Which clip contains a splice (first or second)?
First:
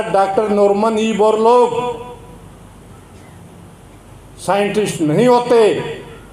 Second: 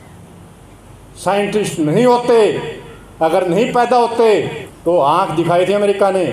second